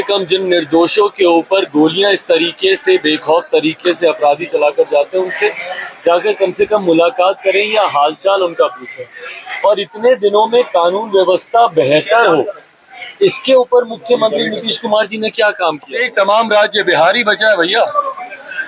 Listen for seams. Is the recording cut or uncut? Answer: cut